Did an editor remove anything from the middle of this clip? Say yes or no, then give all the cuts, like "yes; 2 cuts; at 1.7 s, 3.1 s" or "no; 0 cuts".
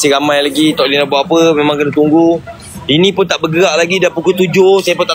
no; 0 cuts